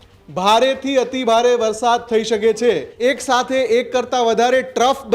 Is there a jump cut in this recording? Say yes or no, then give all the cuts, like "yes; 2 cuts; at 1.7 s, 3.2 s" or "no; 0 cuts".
yes; 1 cut; at 2.9 s